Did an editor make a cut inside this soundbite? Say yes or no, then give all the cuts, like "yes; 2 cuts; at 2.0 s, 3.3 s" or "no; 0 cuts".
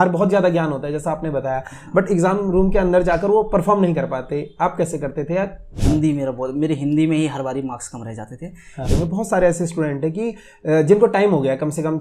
yes; 2 cuts; at 5.6 s, 8.9 s